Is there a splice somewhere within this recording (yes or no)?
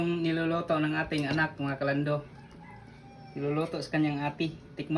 no